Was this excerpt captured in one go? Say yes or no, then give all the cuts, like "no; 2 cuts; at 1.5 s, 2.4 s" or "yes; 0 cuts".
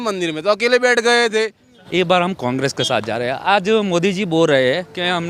no; 1 cut; at 1.7 s